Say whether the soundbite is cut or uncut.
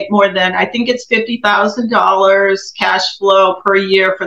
uncut